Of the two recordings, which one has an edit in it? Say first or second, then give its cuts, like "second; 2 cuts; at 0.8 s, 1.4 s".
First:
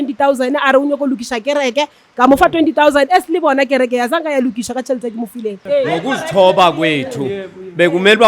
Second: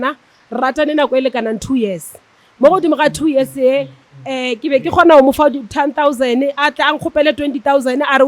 first; 1 cut; at 5.6 s